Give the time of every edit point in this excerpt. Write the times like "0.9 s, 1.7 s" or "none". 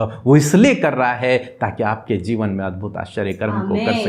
none